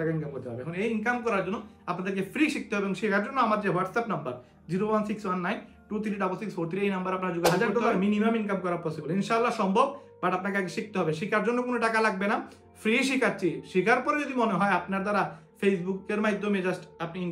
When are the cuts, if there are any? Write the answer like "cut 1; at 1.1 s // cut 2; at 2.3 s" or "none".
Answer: cut 1; at 7.6 s